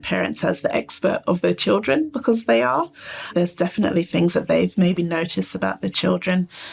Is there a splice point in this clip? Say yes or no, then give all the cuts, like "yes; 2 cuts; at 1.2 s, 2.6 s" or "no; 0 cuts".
no; 0 cuts